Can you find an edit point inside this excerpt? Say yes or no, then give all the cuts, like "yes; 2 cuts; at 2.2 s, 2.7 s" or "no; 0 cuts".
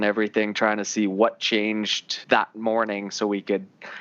yes; 1 cut; at 2.1 s